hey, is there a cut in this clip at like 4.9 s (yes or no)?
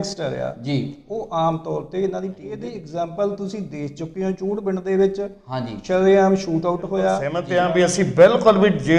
no